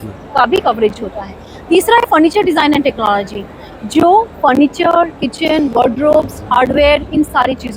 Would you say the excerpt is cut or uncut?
uncut